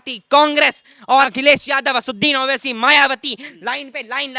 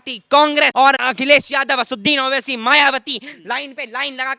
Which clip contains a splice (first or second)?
second